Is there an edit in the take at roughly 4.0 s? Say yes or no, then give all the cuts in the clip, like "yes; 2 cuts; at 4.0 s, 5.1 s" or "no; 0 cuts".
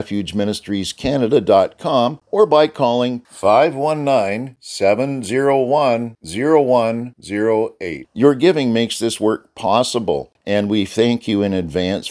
no; 2 cuts; at 2.2 s, 10.3 s